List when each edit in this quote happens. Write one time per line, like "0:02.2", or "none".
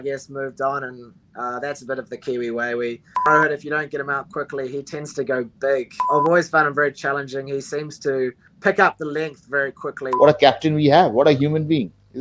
0:03.3
0:06.0
0:08.5
0:10.0